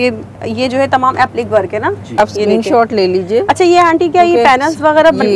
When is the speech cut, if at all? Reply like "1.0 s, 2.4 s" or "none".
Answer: 2.2 s

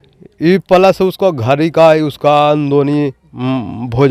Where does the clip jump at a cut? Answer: none

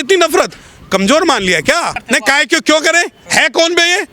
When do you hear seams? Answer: 2.0 s

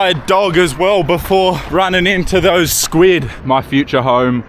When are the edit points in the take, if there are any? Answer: 1.6 s, 3.4 s

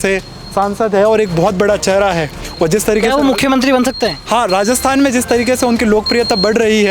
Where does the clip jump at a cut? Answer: 2.4 s

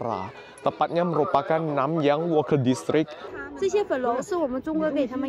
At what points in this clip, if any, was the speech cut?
3.2 s

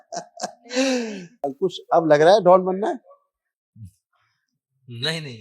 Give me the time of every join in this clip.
1.4 s

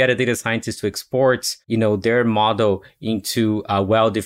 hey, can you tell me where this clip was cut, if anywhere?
1.5 s

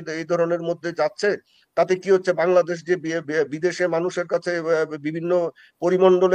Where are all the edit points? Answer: none

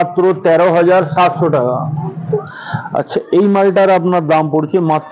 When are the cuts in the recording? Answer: 2.5 s

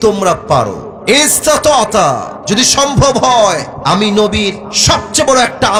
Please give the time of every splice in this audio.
none

